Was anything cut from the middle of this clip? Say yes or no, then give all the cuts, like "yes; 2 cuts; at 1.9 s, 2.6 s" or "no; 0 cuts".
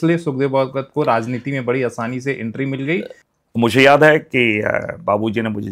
yes; 1 cut; at 3.2 s